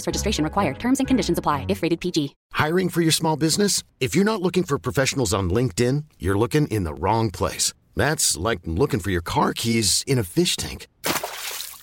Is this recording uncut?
yes; 0 cuts

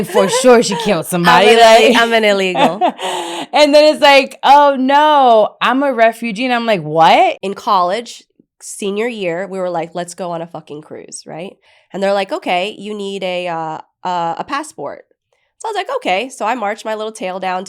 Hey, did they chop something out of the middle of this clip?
yes; 2 cuts; at 7.4 s, 11.7 s

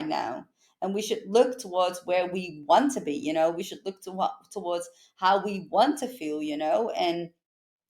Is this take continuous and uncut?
yes; 0 cuts

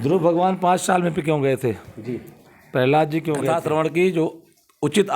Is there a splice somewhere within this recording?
yes; 1 cut; at 3.4 s

